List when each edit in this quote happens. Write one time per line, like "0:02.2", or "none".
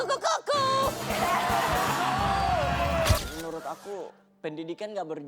0:03.2